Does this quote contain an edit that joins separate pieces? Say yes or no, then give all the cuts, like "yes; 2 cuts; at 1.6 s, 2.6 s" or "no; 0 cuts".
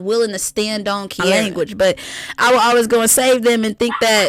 yes; 1 cut; at 1.4 s